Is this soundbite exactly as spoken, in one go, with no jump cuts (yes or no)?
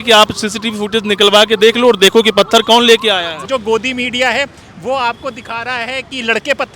no